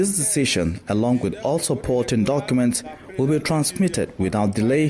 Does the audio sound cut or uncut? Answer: uncut